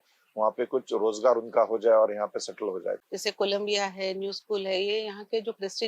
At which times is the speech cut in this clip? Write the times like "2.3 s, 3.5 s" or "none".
3.0 s